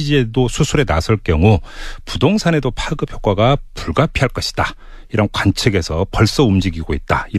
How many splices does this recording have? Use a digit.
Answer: 0